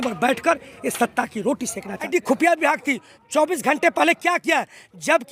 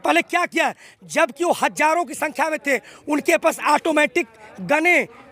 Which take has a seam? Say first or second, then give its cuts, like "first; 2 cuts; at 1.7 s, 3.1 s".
first; 1 cut; at 2.1 s